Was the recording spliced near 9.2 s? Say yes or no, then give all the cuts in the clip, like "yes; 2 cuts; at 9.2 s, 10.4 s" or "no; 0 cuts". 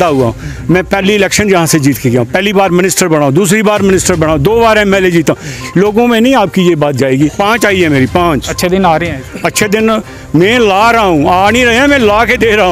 no; 1 cut; at 7.3 s